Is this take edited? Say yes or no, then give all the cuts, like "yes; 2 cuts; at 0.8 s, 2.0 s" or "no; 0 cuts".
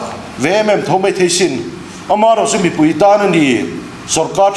no; 0 cuts